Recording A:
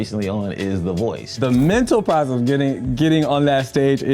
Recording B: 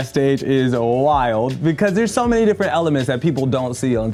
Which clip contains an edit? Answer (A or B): A